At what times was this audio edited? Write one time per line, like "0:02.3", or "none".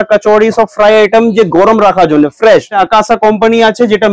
0:02.7